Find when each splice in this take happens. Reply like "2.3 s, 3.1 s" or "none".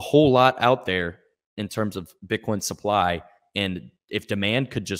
none